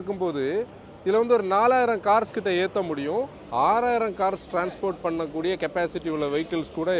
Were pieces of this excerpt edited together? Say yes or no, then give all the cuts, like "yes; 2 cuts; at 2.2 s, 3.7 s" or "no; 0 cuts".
yes; 1 cut; at 3.4 s